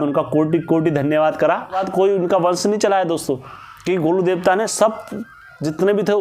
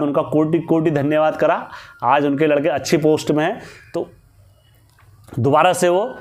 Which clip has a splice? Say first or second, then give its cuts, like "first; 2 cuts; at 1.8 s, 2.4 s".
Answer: first; 1 cut; at 1.8 s